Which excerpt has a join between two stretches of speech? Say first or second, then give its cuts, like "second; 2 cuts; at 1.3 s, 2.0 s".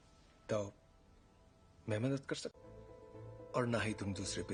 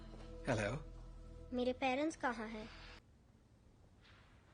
second; 1 cut; at 3.0 s